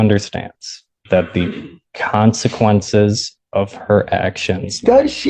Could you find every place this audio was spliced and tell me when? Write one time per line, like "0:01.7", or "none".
none